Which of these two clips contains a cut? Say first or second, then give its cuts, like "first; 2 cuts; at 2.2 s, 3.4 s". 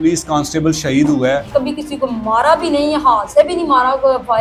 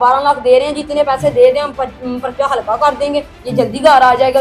first; 1 cut; at 1.5 s